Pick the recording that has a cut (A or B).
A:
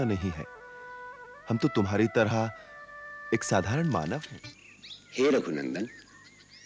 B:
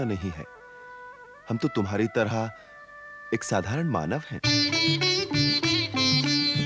A